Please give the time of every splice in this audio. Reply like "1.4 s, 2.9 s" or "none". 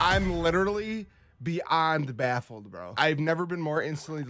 3.0 s